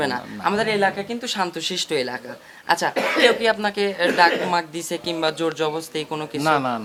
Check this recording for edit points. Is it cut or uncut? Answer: uncut